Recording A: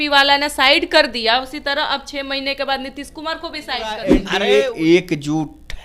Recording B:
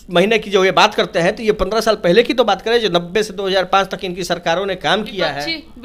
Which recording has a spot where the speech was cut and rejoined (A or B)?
A